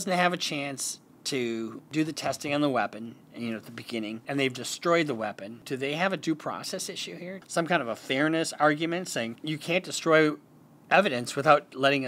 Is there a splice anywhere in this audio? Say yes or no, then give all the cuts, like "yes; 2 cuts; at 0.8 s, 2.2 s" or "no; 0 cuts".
yes; 5 cuts; at 1.8 s, 4.2 s, 5.5 s, 7.3 s, 9.4 s